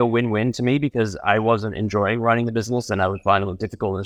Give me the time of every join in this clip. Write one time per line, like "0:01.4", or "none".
none